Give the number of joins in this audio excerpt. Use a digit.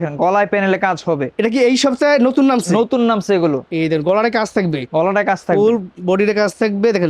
0